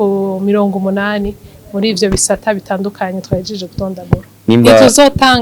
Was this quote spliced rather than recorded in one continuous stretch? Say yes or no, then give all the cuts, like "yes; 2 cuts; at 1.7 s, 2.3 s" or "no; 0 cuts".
yes; 1 cut; at 4.3 s